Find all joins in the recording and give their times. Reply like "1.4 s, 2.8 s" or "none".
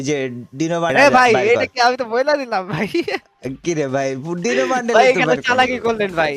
0.9 s